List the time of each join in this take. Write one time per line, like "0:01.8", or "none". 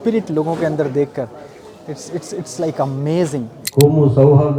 0:03.6